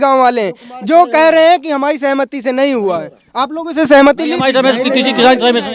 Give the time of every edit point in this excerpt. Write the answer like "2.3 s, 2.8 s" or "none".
none